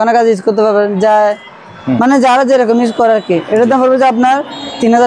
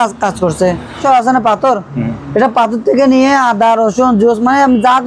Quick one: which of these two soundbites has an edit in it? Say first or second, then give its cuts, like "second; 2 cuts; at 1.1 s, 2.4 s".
second; 1 cut; at 1.0 s